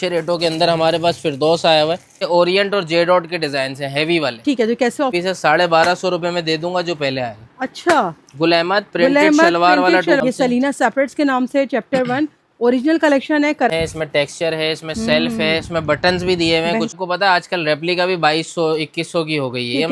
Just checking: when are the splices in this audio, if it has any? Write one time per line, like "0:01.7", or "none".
0:02.3
0:05.1
0:10.2
0:13.7
0:16.9